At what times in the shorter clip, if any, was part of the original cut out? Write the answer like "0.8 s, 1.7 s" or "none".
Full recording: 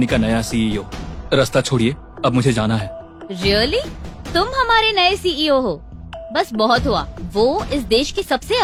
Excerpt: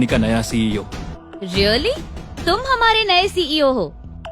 1.1 s